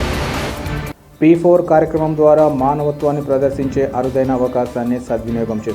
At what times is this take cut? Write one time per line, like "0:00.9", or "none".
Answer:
0:00.9